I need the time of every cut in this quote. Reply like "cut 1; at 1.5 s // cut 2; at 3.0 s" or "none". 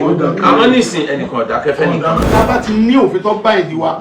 cut 1; at 2.2 s